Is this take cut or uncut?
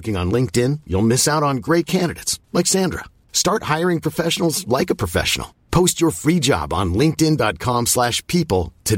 uncut